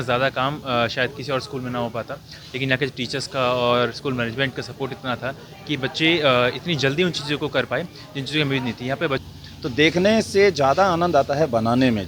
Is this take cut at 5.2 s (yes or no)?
no